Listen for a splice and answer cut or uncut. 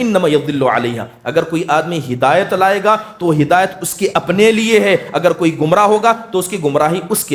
uncut